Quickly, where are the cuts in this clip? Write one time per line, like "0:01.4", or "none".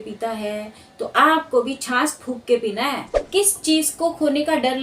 0:03.1